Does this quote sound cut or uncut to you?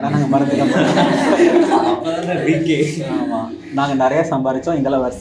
uncut